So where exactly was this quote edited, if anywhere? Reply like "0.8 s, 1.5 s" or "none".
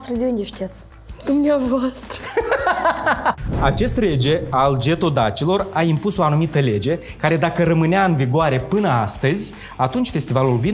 3.4 s